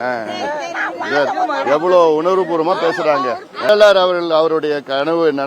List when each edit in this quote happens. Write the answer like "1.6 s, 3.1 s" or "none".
3.7 s